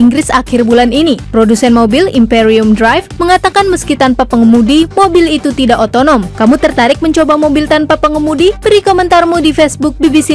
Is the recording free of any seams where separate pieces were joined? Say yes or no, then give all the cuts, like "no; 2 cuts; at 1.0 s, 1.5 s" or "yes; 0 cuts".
yes; 0 cuts